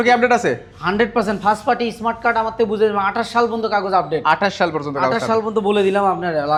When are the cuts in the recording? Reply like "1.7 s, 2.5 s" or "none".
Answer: none